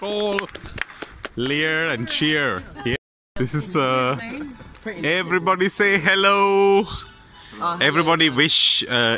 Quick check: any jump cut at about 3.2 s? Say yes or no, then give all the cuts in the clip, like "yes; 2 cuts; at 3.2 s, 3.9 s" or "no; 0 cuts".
yes; 1 cut; at 3.2 s